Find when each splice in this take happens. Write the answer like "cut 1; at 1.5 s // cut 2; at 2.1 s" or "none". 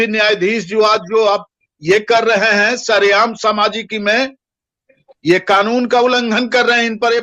none